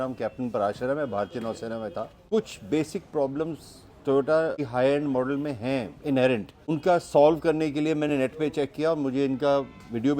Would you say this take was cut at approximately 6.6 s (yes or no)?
yes